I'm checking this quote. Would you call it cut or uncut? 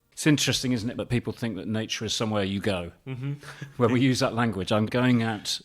cut